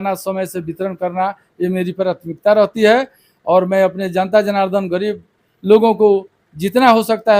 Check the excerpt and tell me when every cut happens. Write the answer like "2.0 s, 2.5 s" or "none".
none